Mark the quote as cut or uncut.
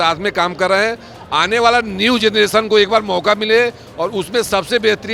uncut